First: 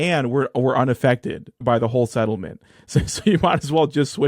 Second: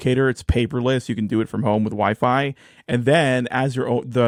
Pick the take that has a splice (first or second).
first